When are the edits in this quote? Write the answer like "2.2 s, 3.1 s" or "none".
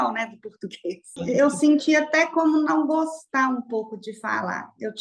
1.2 s